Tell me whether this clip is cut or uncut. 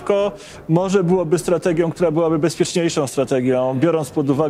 uncut